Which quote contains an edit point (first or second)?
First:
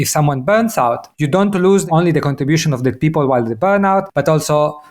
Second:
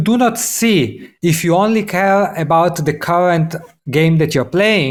first